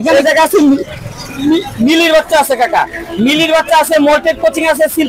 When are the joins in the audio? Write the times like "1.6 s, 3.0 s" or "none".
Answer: none